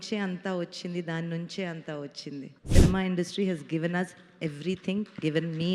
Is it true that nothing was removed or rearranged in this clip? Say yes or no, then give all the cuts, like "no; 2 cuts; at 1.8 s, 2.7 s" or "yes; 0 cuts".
no; 1 cut; at 2.6 s